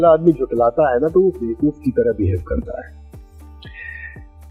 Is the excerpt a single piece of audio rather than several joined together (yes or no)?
yes